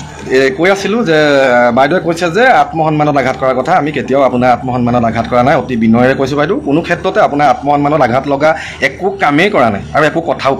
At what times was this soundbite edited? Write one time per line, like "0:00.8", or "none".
none